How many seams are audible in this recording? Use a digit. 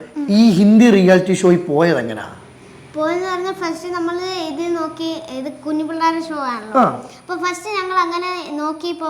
0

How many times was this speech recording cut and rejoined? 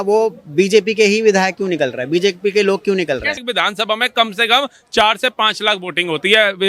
1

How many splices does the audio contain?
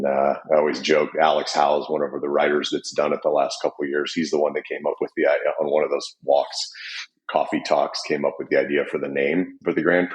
0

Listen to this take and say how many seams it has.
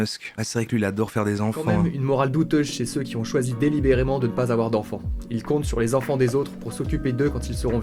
0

